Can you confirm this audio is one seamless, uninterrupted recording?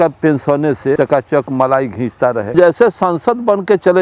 no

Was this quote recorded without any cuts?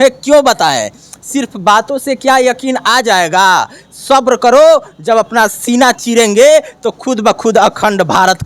yes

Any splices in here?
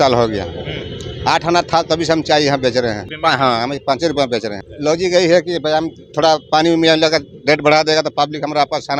yes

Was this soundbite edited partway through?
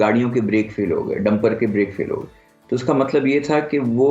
no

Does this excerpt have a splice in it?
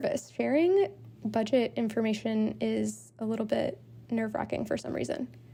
no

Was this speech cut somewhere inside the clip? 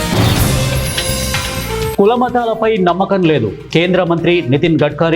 yes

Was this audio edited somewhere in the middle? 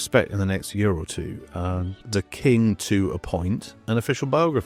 no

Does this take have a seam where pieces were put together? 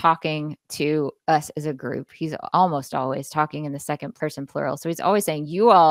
yes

